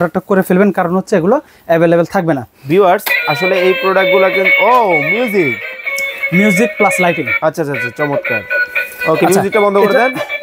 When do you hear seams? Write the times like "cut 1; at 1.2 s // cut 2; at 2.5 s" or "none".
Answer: none

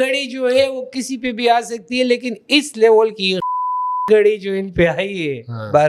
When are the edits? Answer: none

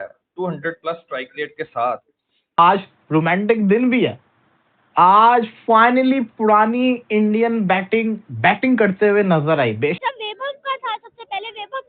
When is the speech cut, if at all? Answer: cut 1; at 2.6 s // cut 2; at 10.0 s

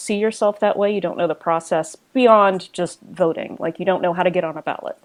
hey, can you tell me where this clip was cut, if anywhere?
none

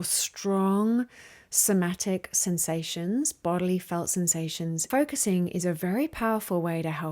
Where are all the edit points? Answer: cut 1; at 4.8 s

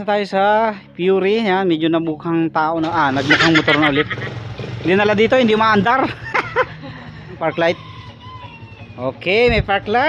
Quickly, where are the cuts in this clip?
cut 1; at 7.4 s

